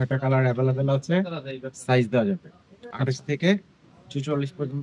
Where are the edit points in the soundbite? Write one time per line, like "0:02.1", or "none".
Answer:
none